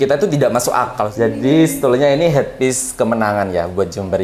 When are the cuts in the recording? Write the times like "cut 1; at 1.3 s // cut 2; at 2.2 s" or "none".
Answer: cut 1; at 1.1 s

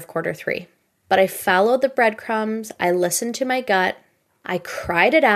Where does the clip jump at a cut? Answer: none

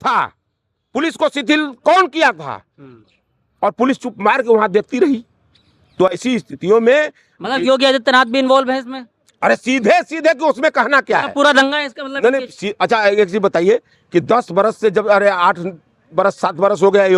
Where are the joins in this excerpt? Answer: none

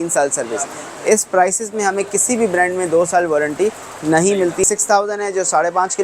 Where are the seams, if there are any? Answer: cut 1; at 4.6 s

